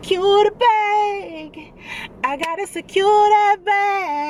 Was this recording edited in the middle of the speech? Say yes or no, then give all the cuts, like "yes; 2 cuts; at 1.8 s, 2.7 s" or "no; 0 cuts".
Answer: no; 0 cuts